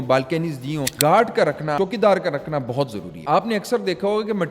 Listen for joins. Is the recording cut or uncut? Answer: cut